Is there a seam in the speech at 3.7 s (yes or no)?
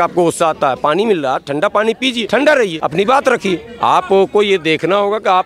yes